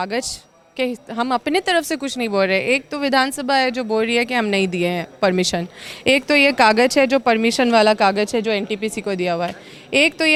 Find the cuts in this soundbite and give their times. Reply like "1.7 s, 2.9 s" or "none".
none